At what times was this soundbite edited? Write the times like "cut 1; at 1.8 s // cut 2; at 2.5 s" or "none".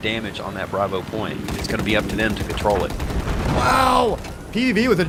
none